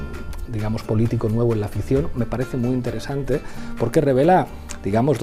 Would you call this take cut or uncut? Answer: uncut